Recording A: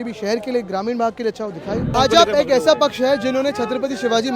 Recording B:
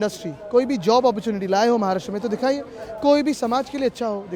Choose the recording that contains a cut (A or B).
A